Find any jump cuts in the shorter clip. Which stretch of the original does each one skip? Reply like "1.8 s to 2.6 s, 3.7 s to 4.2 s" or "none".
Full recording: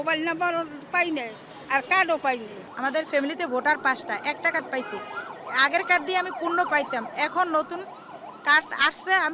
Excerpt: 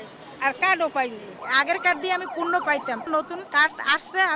2.6 s to 5.4 s, 7.1 s to 8.0 s